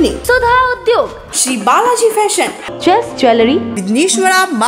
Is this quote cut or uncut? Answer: uncut